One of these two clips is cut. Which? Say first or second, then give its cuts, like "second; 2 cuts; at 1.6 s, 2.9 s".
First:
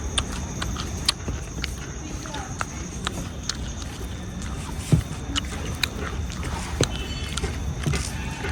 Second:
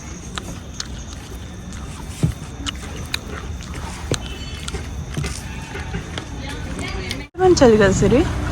second; 1 cut; at 7.4 s